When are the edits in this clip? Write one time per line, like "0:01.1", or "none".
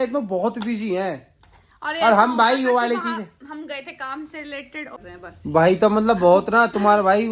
0:05.0